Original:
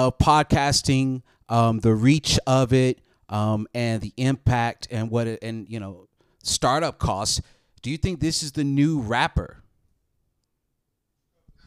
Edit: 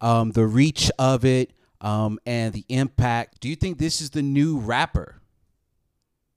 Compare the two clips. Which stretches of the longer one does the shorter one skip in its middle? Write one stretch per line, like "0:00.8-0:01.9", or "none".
0:04.8-0:07.8